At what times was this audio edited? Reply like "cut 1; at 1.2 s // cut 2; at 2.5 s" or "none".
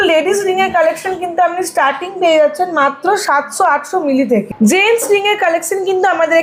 none